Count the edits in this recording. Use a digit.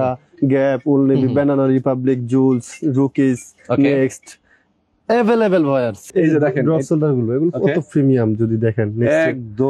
1